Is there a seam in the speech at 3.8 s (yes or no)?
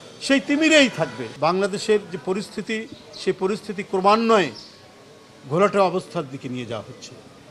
no